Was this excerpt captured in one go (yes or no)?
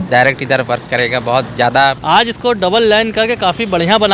no